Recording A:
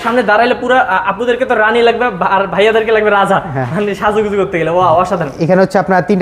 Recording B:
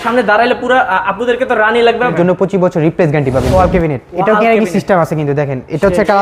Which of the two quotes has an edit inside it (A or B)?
B